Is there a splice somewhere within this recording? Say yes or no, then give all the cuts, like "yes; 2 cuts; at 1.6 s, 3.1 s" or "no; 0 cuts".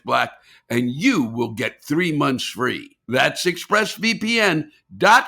yes; 1 cut; at 2.9 s